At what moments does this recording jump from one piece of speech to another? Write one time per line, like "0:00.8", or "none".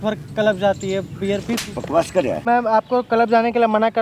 0:02.4

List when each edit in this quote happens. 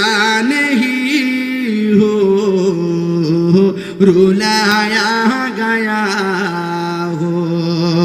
none

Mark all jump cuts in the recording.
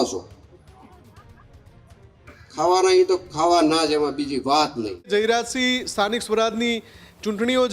0:05.1

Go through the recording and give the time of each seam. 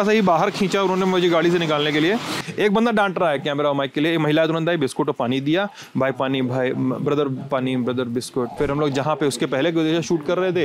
0:02.4
0:08.5

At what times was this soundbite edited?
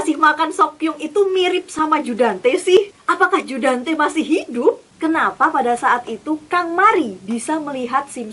0:03.0
0:04.9

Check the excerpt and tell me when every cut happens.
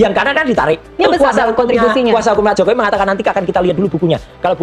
0:01.0

